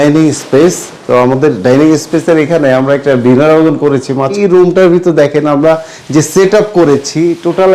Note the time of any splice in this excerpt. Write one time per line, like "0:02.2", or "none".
0:04.4

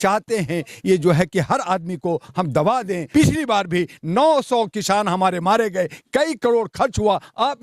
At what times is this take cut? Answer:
0:03.0

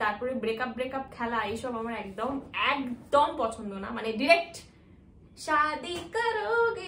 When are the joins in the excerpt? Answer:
none

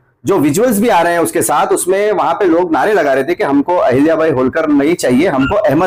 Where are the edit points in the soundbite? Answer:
none

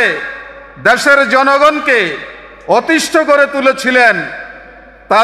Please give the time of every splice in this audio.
none

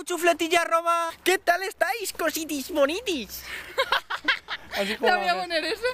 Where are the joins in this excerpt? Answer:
0:01.1

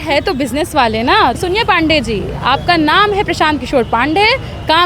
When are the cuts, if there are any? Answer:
0:01.4

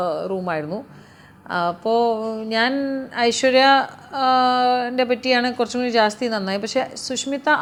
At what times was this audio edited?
none

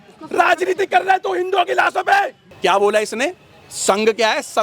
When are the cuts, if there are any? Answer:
0:02.4

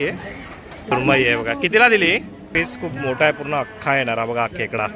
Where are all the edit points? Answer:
0:00.9
0:02.5

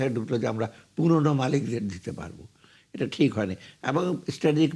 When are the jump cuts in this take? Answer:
none

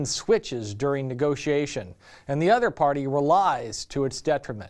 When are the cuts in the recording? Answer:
0:01.0

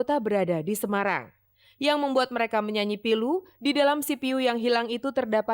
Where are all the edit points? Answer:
none

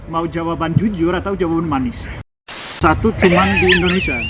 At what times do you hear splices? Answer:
0:02.7

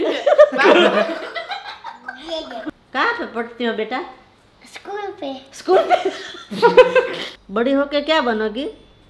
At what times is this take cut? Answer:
0:02.7

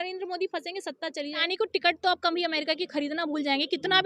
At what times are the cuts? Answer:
0:01.4

